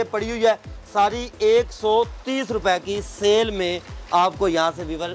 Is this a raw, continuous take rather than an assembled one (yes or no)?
yes